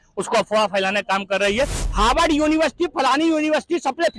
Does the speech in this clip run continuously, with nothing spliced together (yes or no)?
no